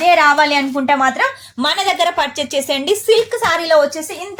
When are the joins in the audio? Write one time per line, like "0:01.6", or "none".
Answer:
none